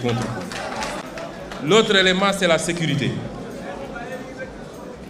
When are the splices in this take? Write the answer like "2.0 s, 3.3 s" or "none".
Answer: 1.0 s